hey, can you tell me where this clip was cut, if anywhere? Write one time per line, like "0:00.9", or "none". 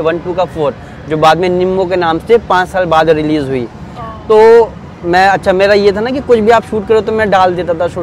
none